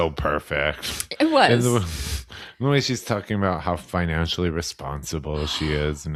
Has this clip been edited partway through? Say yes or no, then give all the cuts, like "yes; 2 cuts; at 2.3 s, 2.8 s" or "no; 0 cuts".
no; 0 cuts